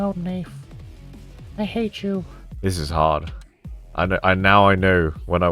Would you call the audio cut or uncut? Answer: cut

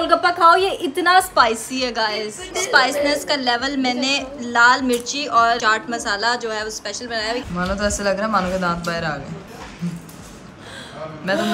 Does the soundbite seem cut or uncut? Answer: cut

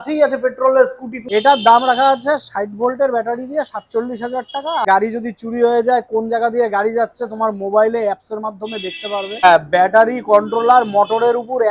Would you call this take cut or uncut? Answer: cut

